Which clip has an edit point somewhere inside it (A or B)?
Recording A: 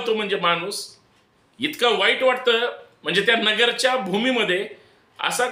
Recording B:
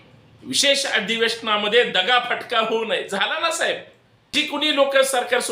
B